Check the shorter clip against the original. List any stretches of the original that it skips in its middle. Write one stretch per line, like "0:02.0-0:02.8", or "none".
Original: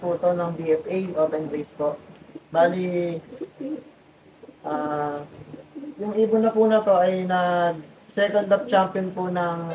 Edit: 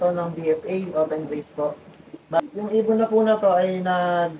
0:02.6-0:05.8